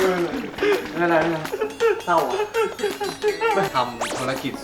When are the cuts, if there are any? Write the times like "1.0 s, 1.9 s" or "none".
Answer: 3.7 s